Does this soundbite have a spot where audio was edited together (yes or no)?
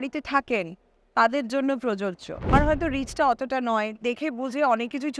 yes